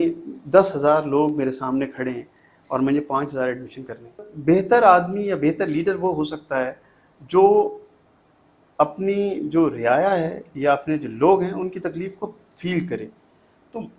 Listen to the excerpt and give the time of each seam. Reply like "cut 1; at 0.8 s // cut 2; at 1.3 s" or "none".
cut 1; at 4.3 s